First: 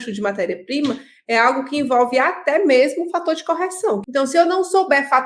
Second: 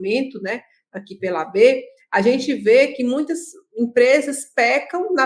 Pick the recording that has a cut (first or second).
first